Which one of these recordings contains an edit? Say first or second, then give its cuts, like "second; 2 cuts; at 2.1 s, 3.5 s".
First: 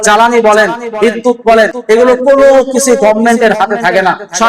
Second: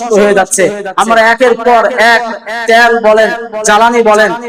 first; 1 cut; at 1.8 s